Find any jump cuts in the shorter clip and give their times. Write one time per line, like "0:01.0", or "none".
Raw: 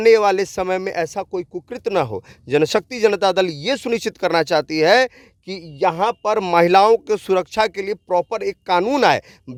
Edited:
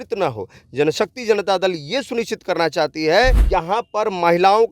0:03.4